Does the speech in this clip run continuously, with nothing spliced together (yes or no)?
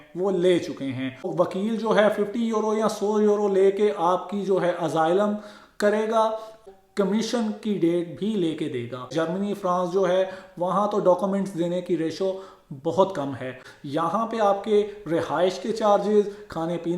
no